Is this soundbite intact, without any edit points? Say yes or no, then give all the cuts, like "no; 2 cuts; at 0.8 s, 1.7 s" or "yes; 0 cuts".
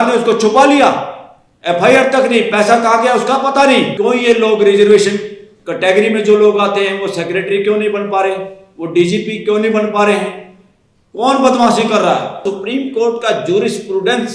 no; 2 cuts; at 3.9 s, 12.5 s